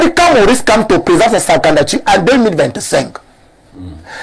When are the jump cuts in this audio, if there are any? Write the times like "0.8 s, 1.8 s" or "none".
none